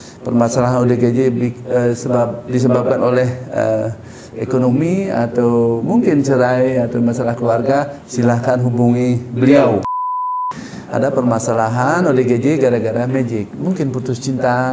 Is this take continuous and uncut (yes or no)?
no